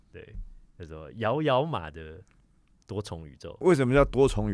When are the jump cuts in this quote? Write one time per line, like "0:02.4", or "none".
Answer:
0:03.6